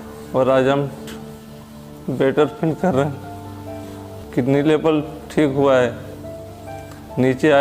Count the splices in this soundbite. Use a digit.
1